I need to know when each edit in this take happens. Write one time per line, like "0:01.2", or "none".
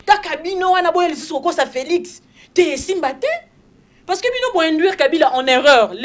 none